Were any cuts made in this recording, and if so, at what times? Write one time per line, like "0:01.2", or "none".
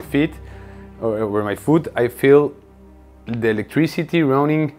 none